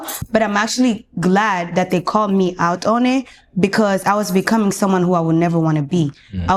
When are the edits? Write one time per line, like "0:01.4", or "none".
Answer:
none

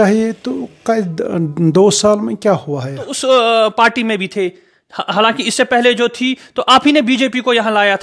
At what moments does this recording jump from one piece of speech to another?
0:03.1

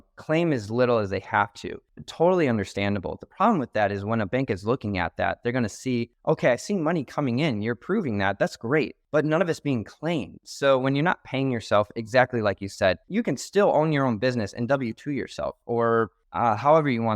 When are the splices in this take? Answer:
0:06.1
0:09.0
0:13.0
0:16.2

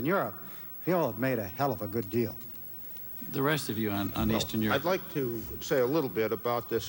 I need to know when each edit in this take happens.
none

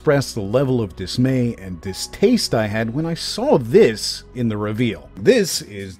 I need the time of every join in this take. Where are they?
0:05.1

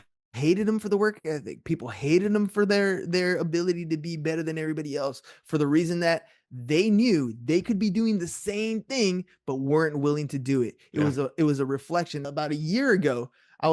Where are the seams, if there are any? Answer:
0:12.2

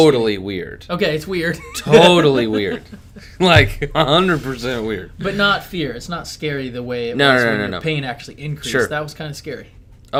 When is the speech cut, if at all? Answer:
none

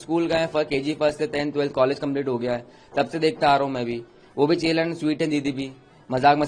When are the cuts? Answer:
none

